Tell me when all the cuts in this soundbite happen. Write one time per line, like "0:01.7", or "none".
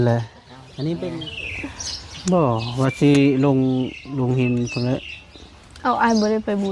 0:01.1